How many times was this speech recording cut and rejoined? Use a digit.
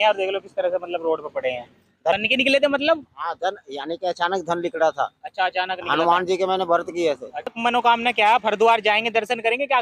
2